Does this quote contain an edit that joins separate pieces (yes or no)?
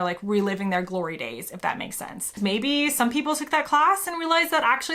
yes